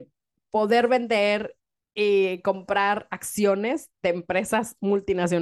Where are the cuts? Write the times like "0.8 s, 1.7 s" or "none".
none

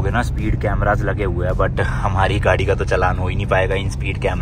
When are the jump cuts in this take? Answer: none

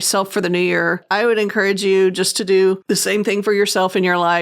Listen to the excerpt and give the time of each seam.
1.0 s, 2.8 s

